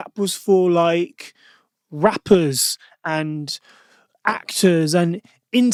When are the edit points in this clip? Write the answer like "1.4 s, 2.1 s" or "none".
none